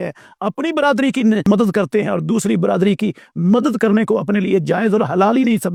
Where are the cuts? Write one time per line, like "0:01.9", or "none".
none

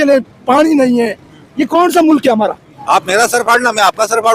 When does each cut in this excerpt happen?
0:02.7

